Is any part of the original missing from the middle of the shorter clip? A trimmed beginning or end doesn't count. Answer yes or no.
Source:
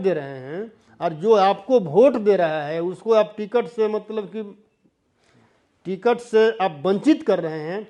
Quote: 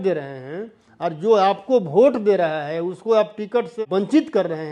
yes